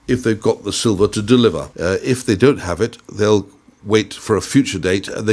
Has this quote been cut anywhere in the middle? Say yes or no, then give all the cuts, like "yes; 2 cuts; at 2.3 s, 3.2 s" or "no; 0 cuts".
yes; 1 cut; at 1.7 s